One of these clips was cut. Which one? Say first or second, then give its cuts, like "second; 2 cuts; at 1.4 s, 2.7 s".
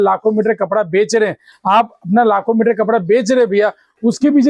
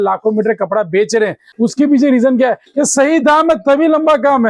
second; 1 cut; at 1.4 s